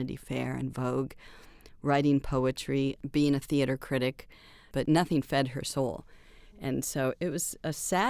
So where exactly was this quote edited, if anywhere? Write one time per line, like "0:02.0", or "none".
0:03.0
0:04.6
0:07.2